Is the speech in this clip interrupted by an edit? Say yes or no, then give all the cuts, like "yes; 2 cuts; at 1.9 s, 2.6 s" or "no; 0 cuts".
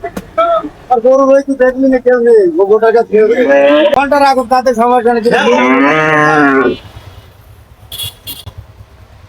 yes; 1 cut; at 4.0 s